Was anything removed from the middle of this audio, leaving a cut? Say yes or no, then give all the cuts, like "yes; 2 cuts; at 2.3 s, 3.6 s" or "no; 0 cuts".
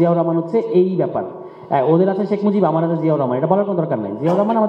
no; 0 cuts